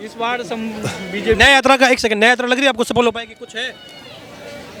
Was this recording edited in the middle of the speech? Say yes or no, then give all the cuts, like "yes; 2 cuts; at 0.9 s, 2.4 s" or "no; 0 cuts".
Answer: no; 0 cuts